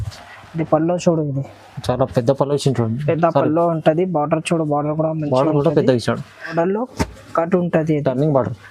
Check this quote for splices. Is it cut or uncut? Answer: cut